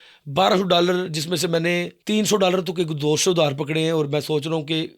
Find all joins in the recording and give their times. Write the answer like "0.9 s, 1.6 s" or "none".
2.0 s